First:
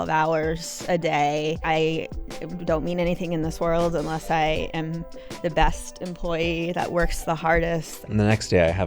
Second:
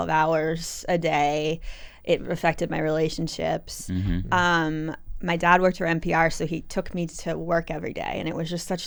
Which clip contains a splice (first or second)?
first